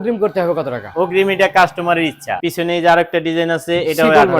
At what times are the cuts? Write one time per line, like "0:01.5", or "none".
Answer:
0:02.3